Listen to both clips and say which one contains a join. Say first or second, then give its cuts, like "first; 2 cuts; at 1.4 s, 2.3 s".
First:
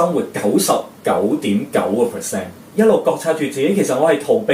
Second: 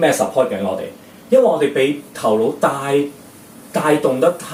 first; 1 cut; at 2.6 s